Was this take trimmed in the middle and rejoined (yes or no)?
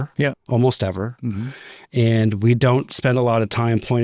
no